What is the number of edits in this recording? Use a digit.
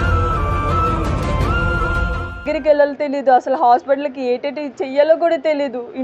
1